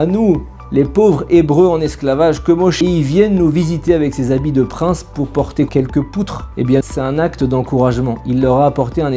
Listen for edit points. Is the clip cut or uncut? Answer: cut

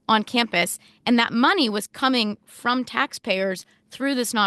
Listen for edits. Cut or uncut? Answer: uncut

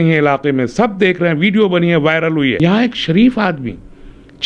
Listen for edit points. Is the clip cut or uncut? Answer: cut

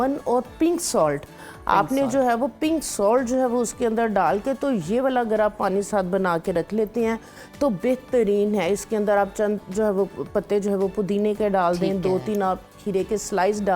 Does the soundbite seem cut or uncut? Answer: uncut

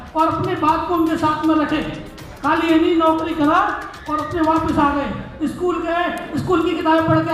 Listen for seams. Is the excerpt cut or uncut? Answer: uncut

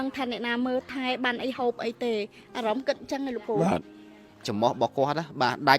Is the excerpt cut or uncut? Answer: cut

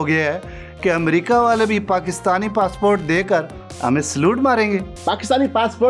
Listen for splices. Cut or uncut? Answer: cut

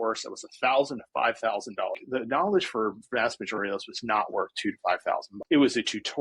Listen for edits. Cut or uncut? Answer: cut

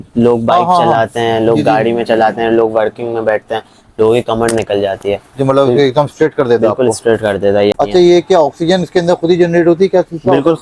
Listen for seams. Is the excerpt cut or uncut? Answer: cut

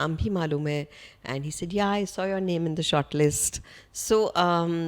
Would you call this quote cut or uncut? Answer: uncut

